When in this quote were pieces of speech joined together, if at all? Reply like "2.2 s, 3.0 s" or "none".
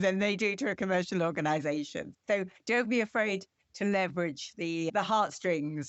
none